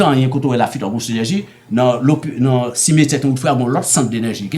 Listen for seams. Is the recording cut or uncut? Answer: uncut